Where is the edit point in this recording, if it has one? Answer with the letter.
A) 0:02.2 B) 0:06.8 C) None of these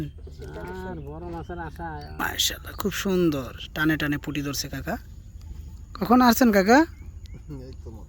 A